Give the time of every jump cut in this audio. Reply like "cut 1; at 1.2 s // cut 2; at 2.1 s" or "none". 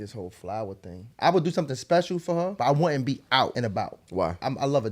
cut 1; at 1.0 s // cut 2; at 2.5 s // cut 3; at 4.0 s